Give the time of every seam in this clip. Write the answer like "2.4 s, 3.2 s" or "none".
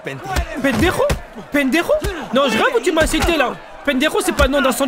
none